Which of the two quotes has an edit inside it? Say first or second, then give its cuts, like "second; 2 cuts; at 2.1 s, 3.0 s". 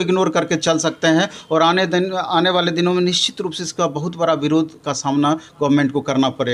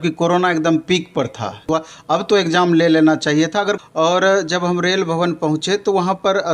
second; 2 cuts; at 1.6 s, 3.8 s